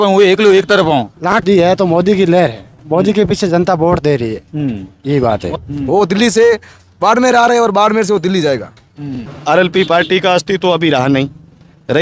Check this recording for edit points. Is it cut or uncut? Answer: cut